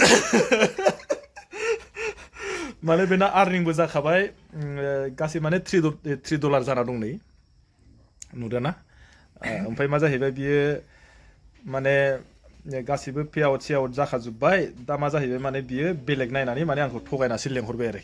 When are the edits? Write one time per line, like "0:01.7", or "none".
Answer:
none